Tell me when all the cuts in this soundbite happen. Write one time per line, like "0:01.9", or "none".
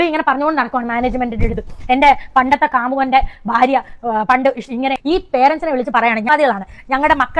0:05.0